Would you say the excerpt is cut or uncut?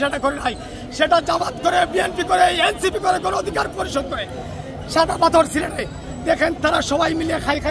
uncut